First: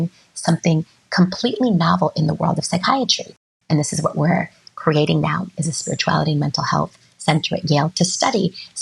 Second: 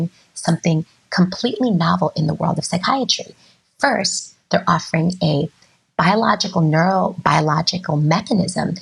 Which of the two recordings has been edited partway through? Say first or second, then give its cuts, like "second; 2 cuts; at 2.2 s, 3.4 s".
first; 1 cut; at 3.5 s